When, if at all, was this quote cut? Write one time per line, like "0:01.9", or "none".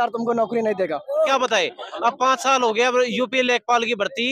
0:01.3

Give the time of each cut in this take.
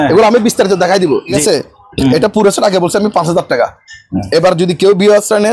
0:01.4

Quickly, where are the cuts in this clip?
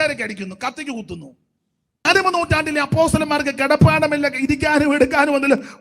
0:02.0

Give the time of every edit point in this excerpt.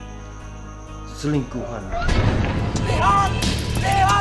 0:01.9
0:02.8

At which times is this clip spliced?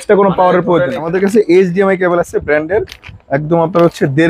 0:01.0

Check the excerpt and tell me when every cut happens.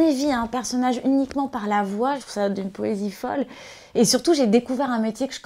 0:02.3

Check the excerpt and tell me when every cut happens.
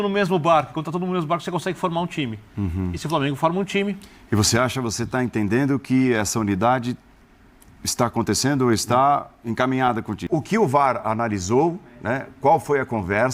0:10.1

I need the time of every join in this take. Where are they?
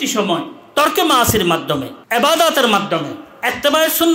0:02.0

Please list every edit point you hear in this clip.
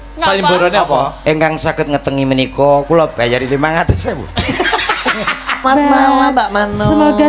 0:05.6

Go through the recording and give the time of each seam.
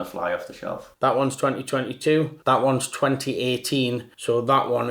0:00.9

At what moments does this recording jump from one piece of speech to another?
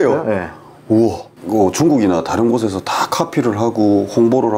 0:01.3

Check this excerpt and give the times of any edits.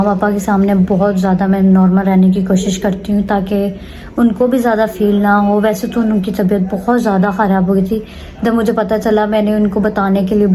none

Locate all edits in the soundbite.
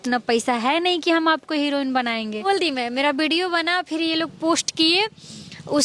0:02.5

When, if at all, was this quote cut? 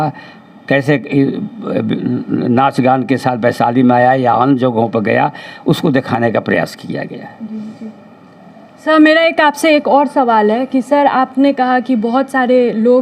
none

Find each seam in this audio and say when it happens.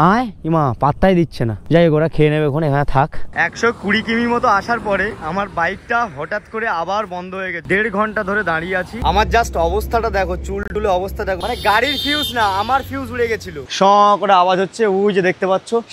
0:03.3
0:07.6
0:08.9
0:13.7

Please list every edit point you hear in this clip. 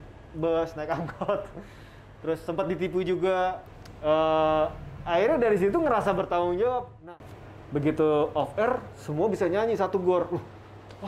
0:03.7
0:07.0

